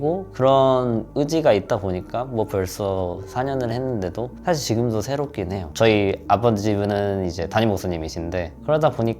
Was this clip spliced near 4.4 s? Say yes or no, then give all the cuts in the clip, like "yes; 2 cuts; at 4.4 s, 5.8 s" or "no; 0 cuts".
no; 1 cut; at 5.7 s